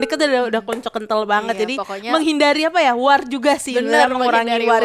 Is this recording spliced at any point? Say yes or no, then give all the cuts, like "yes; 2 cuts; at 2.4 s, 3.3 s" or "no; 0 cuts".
no; 0 cuts